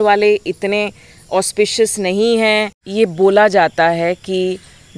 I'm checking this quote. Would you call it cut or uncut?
cut